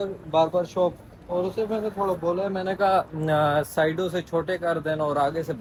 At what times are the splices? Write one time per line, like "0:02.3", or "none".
none